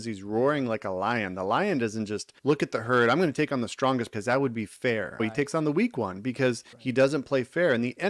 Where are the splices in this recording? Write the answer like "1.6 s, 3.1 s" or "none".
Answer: 2.3 s, 4.1 s, 5.2 s, 6.7 s

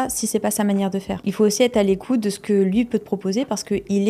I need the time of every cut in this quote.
1.1 s

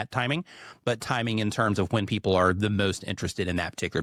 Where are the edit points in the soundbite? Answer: none

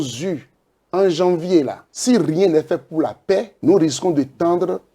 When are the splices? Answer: 1.9 s, 3.5 s

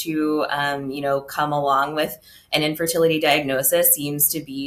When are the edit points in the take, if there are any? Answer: none

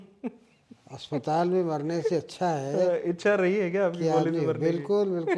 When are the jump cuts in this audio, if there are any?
none

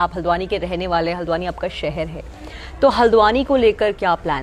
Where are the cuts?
none

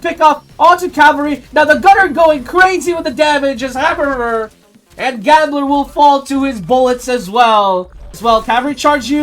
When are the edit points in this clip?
8.1 s

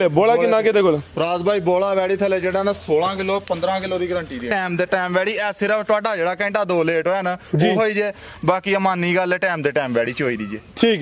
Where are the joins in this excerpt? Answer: 4.5 s

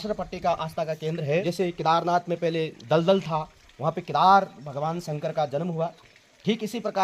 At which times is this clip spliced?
1.5 s

